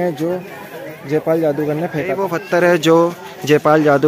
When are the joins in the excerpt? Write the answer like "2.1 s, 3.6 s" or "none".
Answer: 2.4 s